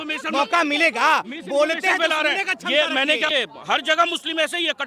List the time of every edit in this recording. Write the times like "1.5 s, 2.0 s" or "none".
3.3 s